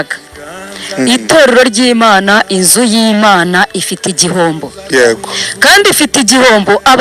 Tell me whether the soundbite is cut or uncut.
uncut